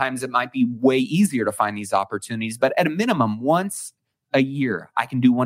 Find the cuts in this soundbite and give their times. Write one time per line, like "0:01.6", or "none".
none